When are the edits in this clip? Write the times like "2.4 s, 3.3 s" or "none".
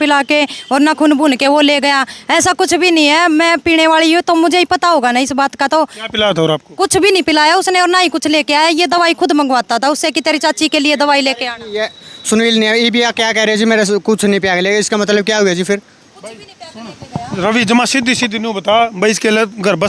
none